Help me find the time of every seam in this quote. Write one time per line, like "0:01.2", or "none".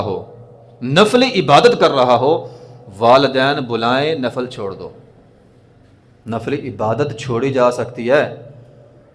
none